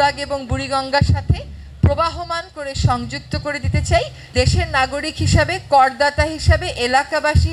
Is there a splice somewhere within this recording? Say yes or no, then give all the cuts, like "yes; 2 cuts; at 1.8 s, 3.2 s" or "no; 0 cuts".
yes; 1 cut; at 4.3 s